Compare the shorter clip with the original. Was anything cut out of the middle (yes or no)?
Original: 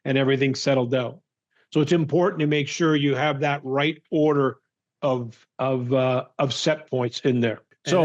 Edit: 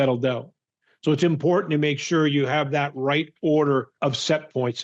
yes